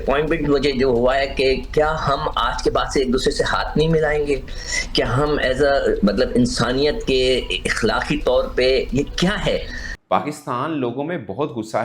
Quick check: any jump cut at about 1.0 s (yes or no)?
no